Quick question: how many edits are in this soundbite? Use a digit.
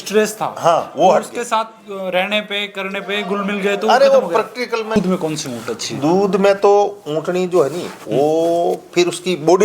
1